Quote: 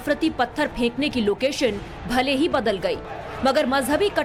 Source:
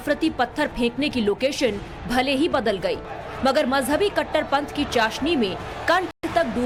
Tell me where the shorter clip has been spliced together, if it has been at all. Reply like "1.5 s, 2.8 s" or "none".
none